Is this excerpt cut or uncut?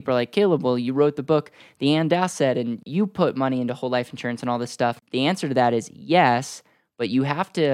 cut